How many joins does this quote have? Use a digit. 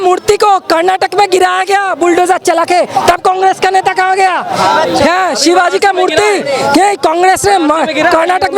0